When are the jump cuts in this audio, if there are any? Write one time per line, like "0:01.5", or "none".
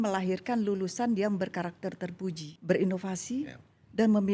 0:02.5